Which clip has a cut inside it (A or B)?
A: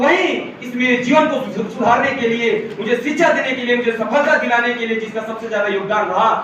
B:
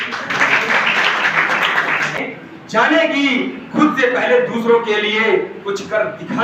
B